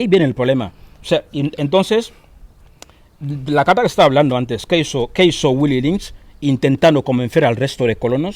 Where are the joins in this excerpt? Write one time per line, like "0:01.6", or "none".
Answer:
none